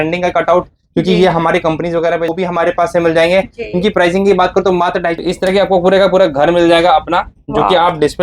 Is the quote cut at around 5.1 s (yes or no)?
yes